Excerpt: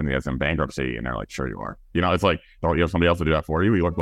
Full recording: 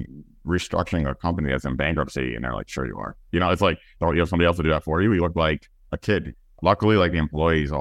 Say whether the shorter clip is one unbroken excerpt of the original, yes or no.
yes